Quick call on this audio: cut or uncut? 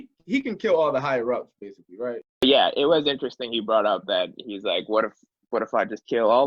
cut